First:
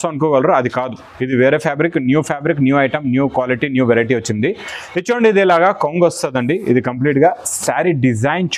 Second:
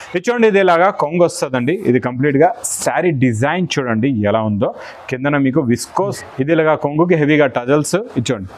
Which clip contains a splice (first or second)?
second